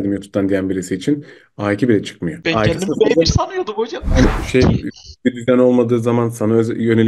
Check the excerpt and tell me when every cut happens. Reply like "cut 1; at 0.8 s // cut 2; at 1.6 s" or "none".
cut 1; at 4.2 s

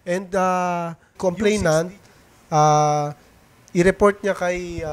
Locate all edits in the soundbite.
cut 1; at 1.1 s

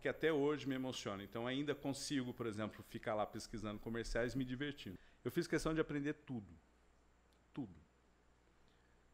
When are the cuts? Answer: cut 1; at 4.9 s

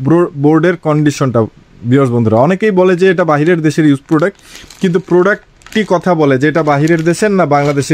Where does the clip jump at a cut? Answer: none

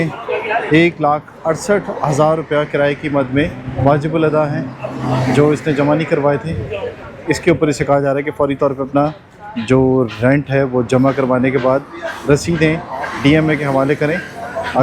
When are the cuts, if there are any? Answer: none

